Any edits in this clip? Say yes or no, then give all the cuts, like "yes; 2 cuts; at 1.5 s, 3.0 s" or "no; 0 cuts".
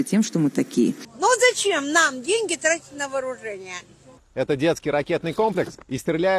yes; 2 cuts; at 1.1 s, 4.5 s